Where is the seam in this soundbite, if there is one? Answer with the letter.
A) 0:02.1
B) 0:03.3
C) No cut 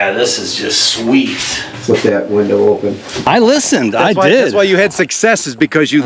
B